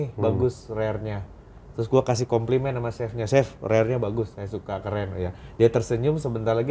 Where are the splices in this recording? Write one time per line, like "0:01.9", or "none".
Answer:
none